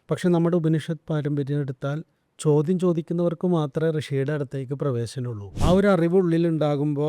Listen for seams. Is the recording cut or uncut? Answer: cut